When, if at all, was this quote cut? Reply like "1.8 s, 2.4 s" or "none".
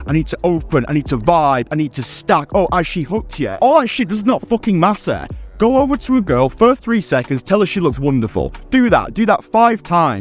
3.5 s